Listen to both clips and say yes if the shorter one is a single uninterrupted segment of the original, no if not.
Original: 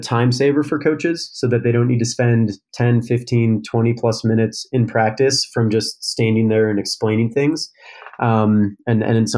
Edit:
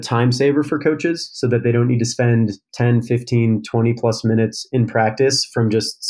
yes